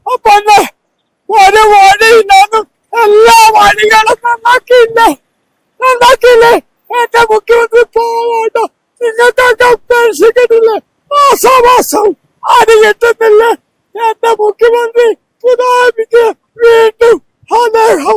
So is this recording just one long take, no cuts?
yes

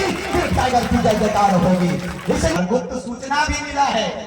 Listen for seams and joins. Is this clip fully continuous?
no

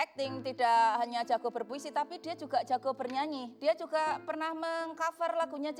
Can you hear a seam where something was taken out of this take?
no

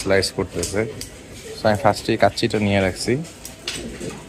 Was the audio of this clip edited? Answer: no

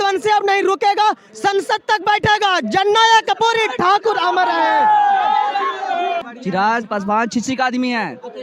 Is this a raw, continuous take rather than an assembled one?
no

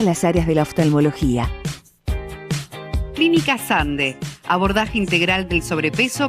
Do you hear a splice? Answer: no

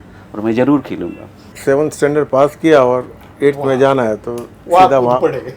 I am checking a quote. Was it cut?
yes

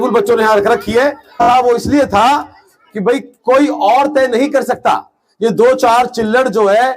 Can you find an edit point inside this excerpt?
yes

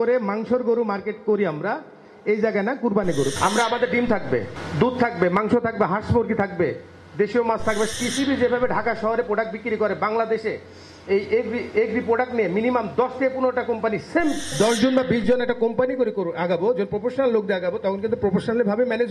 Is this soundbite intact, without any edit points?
no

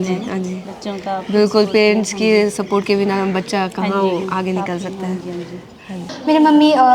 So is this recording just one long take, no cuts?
no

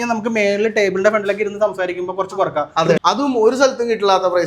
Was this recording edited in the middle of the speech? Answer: yes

